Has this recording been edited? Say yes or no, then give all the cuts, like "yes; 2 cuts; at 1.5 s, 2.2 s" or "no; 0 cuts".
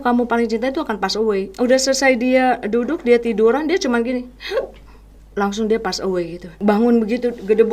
yes; 2 cuts; at 1.5 s, 6.4 s